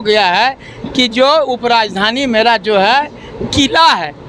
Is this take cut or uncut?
uncut